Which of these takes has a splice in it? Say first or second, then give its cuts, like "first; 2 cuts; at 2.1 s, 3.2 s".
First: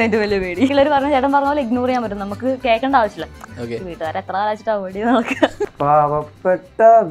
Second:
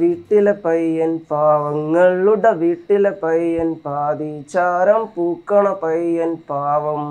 first; 3 cuts; at 0.7 s, 3.4 s, 5.6 s